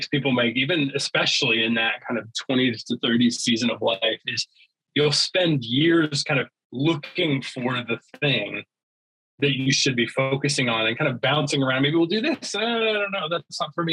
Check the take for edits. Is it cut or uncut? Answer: uncut